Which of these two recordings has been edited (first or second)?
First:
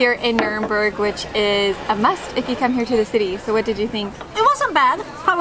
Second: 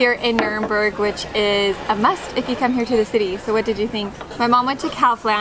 second